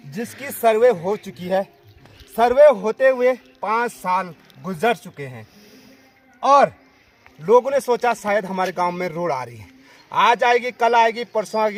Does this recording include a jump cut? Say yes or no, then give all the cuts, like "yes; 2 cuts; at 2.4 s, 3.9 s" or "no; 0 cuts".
no; 0 cuts